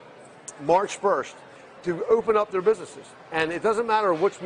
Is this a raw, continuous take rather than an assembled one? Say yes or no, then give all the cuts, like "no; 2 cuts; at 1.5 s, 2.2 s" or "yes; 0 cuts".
yes; 0 cuts